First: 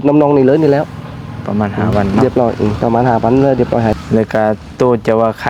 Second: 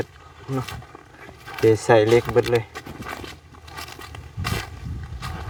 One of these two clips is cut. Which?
first; 1 cut; at 3.9 s

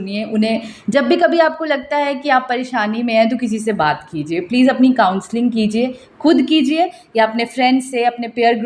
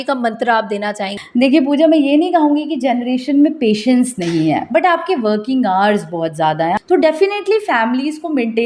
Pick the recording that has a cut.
second; 2 cuts; at 1.2 s, 6.8 s

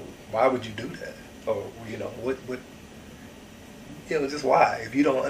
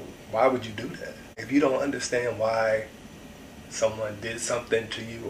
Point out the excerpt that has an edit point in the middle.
second; 1 cut; at 1.4 s

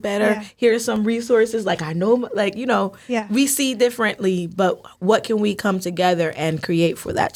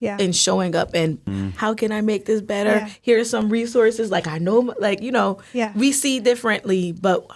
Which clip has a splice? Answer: second; 1 cut; at 1.3 s

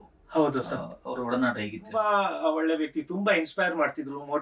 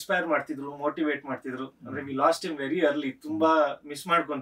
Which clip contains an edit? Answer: first; 1 cut; at 1.8 s

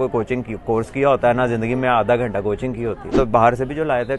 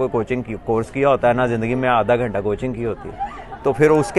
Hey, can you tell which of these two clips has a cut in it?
first; 1 cut; at 3.1 s

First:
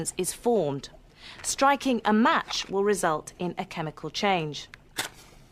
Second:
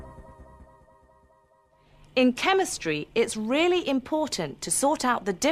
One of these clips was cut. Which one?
second; 1 cut; at 1.0 s

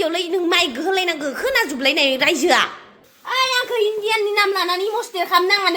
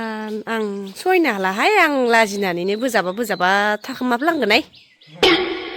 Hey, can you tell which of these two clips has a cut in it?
first; 1 cut; at 3.2 s

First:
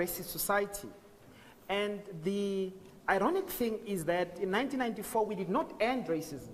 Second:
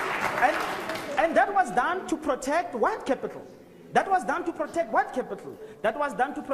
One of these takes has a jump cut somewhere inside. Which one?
first; 1 cut; at 3.2 s

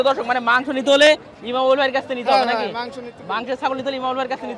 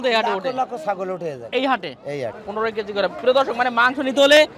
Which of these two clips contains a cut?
second; 1 cut; at 2.4 s

